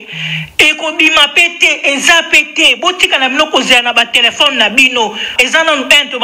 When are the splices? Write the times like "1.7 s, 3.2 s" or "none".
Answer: 5.3 s